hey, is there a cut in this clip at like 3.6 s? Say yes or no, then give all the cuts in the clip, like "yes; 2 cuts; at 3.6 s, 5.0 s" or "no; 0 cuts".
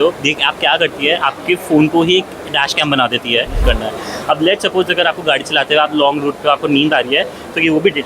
yes; 1 cut; at 3.6 s